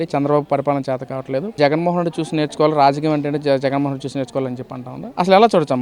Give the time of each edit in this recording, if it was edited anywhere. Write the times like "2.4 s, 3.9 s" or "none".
1.5 s